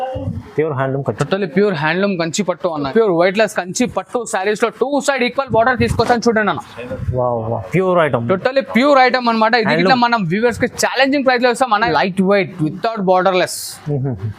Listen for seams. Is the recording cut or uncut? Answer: cut